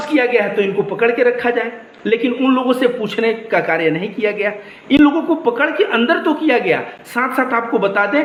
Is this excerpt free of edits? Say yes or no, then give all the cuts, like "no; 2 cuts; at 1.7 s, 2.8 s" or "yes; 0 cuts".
yes; 0 cuts